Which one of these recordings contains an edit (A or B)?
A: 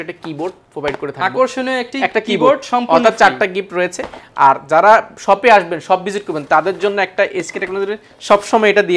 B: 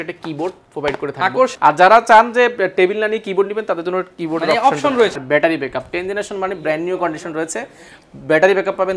B